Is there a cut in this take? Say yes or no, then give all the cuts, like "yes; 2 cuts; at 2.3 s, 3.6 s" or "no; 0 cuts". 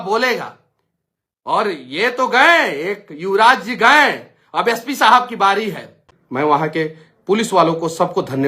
yes; 1 cut; at 6.1 s